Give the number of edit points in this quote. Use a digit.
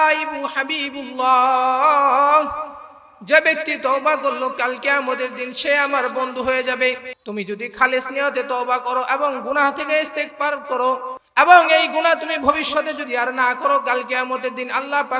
2